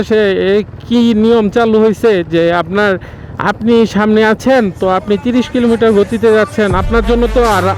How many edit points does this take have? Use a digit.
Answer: 0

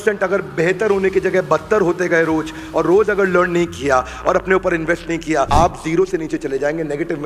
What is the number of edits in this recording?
1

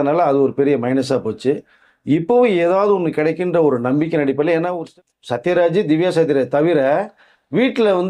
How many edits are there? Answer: 1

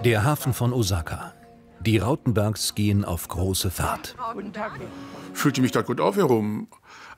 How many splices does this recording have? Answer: 1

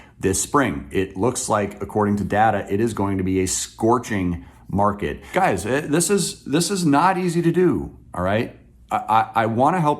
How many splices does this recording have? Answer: 1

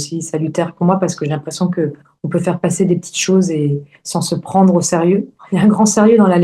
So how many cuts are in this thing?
1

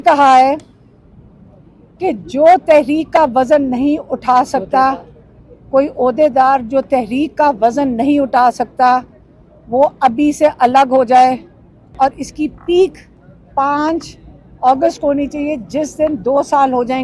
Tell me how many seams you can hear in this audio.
1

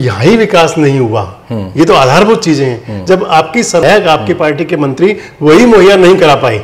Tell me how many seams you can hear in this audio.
1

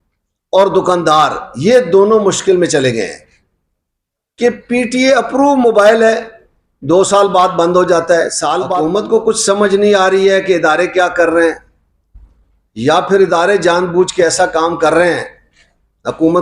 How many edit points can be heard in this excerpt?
1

